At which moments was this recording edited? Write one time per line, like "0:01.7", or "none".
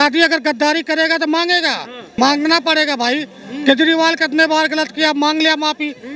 0:02.0